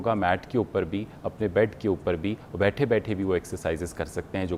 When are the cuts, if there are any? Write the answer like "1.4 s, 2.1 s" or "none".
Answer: none